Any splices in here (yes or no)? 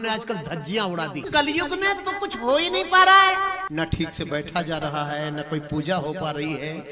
yes